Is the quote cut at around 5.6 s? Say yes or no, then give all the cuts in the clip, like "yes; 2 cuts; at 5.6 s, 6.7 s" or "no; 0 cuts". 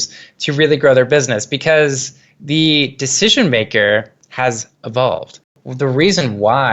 yes; 1 cut; at 5.6 s